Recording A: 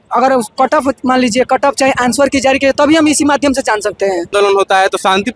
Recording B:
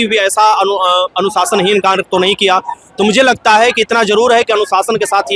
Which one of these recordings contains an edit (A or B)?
A